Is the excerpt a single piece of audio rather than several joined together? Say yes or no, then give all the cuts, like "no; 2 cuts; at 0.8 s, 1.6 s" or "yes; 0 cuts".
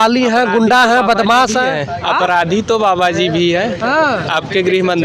yes; 0 cuts